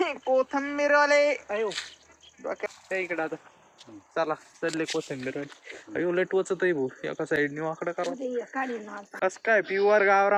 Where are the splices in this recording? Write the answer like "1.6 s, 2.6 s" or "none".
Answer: none